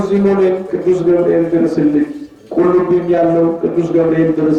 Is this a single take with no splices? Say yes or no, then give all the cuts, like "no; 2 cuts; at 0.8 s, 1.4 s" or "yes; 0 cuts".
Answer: yes; 0 cuts